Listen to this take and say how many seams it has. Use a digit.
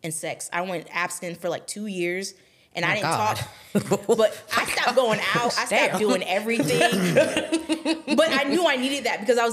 0